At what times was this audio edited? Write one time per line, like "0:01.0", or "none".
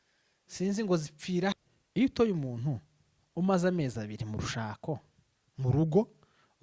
0:01.5